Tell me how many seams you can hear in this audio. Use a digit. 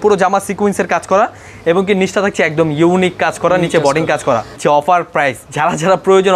2